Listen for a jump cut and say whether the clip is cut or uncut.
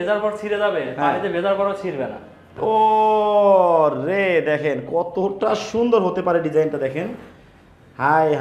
cut